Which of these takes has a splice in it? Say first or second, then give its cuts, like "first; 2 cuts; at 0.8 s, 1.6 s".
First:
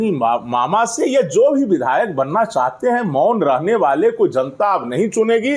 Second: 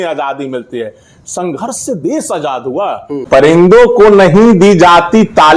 second; 1 cut; at 3.2 s